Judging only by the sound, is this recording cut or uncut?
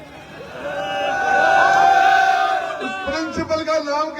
uncut